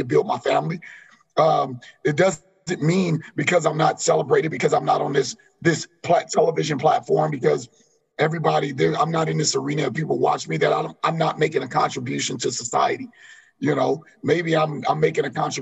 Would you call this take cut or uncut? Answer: uncut